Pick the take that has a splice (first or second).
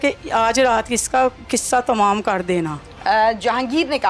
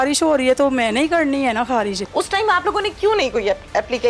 second